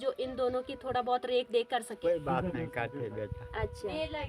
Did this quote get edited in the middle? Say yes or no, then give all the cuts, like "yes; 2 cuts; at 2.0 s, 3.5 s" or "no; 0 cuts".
yes; 1 cut; at 1.9 s